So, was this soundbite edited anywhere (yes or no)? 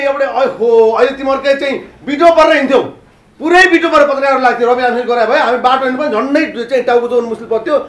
no